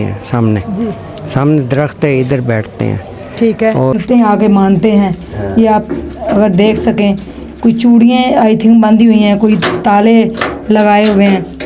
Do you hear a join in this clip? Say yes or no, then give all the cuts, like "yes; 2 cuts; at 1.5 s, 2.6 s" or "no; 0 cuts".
yes; 1 cut; at 3.9 s